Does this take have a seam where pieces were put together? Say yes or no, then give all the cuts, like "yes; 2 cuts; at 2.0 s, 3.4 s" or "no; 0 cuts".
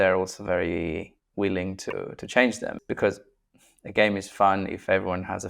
yes; 2 cuts; at 1.2 s, 2.8 s